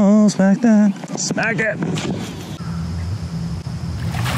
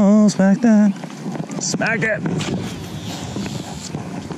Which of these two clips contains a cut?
first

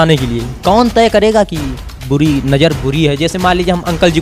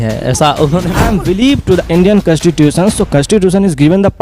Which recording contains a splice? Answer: second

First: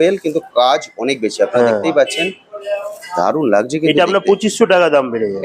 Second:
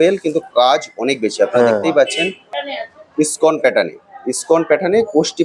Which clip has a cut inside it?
second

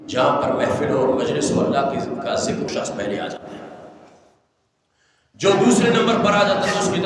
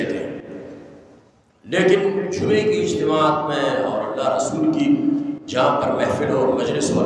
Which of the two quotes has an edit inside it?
first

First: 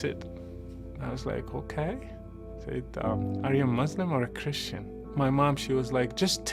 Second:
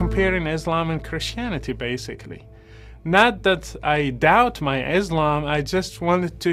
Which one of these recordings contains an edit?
first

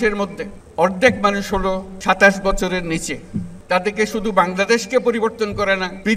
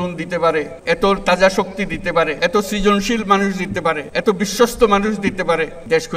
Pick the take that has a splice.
first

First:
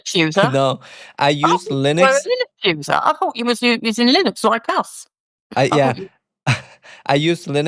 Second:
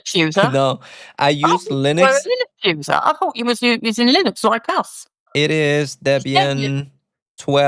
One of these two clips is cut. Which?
second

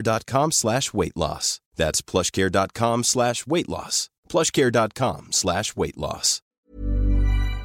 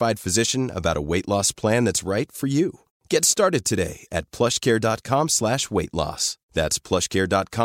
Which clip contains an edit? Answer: first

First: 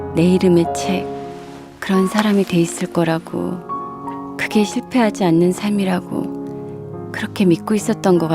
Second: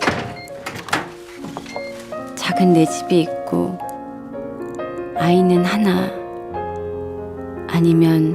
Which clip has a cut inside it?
first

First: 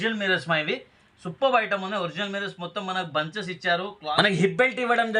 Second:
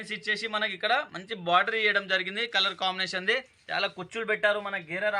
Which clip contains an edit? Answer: first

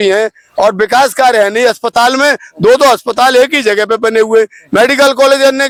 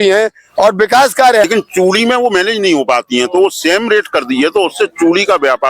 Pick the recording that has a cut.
second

